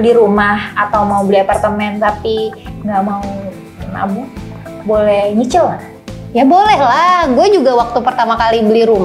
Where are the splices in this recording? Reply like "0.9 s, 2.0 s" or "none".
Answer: none